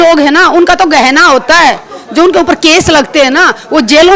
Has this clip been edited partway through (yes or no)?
no